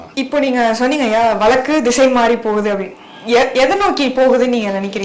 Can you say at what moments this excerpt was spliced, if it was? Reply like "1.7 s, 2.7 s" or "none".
none